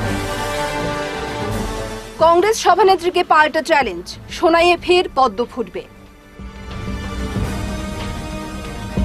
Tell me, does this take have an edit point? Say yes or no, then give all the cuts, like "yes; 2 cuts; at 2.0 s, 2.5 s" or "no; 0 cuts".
yes; 1 cut; at 1.4 s